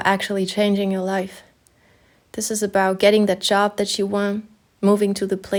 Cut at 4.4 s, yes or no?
no